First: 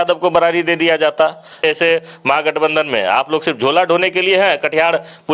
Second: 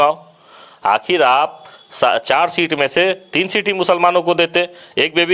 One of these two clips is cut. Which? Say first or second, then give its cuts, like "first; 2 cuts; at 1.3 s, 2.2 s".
first; 1 cut; at 1.6 s